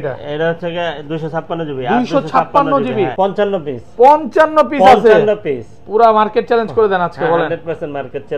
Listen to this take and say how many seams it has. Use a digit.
1